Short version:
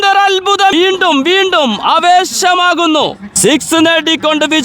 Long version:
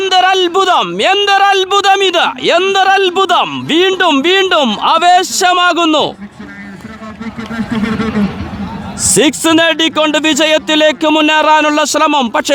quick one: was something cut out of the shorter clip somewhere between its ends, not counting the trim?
yes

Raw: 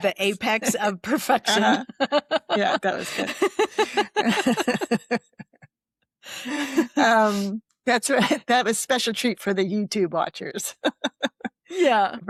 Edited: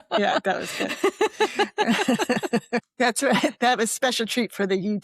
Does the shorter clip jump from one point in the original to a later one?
yes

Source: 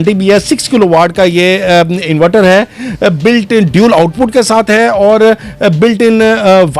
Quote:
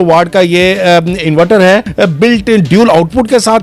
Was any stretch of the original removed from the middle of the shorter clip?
yes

